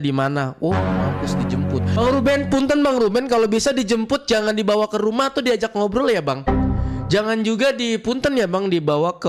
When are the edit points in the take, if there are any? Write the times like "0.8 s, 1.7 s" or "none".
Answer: none

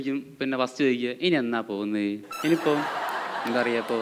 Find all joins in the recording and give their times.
2.3 s

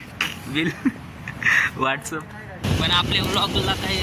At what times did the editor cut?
2.7 s

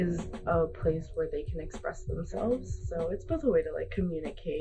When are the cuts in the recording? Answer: 2.8 s

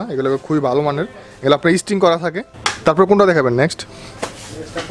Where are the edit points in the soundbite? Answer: none

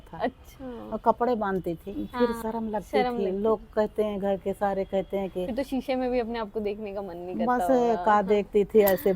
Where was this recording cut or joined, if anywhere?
2.0 s, 5.5 s

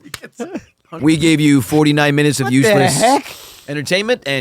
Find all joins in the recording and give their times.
1.0 s

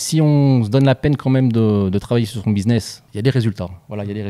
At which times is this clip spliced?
none

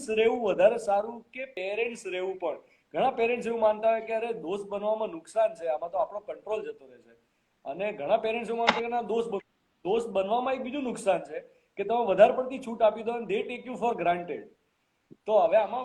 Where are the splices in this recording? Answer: 1.5 s

